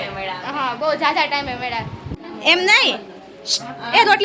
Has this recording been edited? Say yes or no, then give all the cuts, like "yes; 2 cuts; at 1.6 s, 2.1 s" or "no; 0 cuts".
yes; 1 cut; at 2.0 s